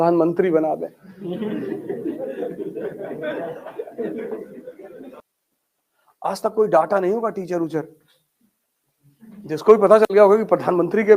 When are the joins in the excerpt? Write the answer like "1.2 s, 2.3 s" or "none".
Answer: 5.2 s